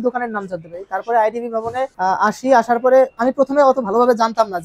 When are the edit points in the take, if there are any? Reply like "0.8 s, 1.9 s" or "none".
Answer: 1.9 s